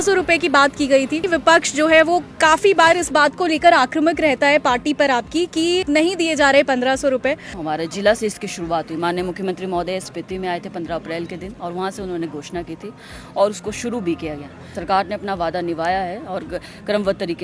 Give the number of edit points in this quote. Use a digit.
4